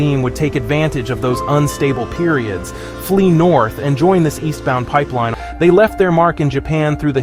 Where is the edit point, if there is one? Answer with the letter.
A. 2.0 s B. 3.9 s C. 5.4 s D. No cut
C